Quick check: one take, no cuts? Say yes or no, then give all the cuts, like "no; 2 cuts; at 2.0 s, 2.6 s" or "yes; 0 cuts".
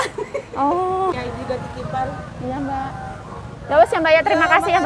no; 1 cut; at 1.1 s